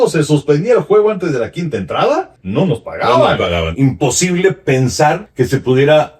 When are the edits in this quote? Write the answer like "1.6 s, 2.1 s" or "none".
2.4 s, 3.7 s, 5.3 s